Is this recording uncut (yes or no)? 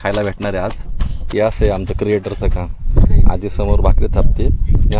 no